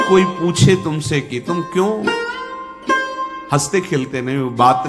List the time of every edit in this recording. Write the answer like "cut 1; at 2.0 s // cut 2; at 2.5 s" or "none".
cut 1; at 2.0 s // cut 2; at 3.5 s